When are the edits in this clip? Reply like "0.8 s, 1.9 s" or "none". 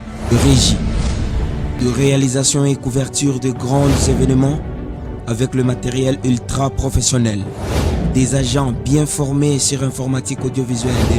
1.7 s